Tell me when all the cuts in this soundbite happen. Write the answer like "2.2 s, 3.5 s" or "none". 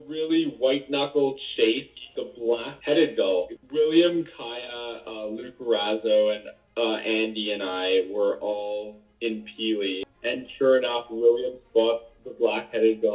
1.9 s, 3.5 s, 10.1 s